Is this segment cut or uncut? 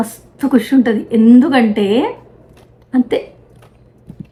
uncut